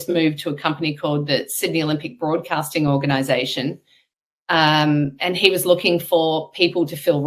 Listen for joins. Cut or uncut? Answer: uncut